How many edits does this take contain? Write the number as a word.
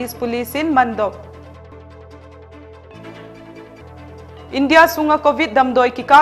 two